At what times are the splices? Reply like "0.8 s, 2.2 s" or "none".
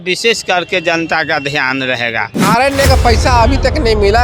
2.3 s